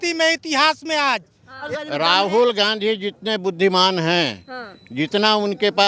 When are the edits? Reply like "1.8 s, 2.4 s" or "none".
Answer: 1.7 s